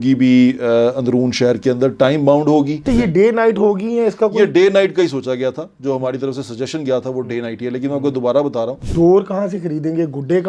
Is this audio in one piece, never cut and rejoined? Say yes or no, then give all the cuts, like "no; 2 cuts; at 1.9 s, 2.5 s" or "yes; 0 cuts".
no; 2 cuts; at 2.8 s, 8.8 s